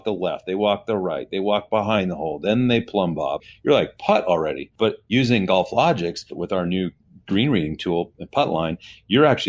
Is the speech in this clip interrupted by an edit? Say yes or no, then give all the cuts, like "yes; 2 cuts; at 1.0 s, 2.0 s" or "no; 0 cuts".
yes; 3 cuts; at 3.4 s, 5.1 s, 6.4 s